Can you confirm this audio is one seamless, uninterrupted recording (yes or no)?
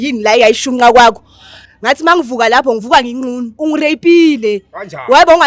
no